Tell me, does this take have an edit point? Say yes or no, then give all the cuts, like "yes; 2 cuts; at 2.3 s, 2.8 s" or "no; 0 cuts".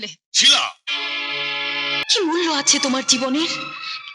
yes; 1 cut; at 2.0 s